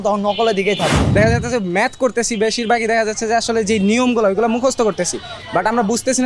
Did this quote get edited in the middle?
yes; 1 cut; at 1.0 s

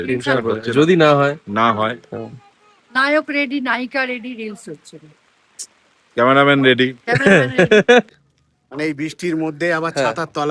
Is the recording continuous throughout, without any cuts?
no; 1 cut; at 8.1 s

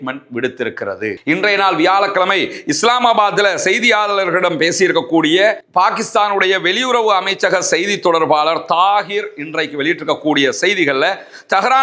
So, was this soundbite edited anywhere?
no; 0 cuts

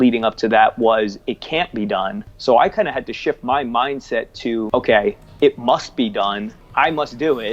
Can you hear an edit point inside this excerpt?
yes; 3 cuts; at 2.3 s, 4.7 s, 6.5 s

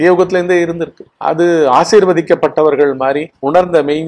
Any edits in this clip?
no; 0 cuts

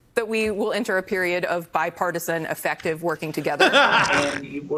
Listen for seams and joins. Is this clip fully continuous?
yes; 0 cuts

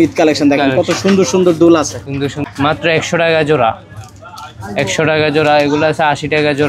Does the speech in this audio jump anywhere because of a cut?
yes; 1 cut; at 2.4 s

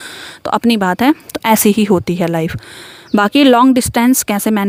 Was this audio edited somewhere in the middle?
no; 0 cuts

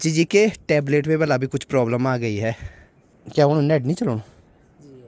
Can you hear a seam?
no; 0 cuts

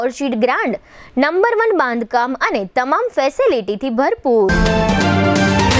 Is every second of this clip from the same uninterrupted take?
no; 1 cut; at 4.5 s

